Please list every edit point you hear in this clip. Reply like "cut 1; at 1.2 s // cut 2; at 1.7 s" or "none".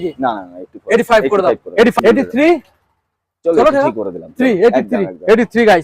cut 1; at 1.9 s